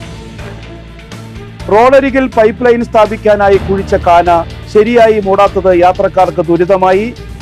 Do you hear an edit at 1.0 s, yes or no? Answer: yes